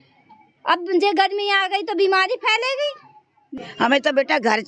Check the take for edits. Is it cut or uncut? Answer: cut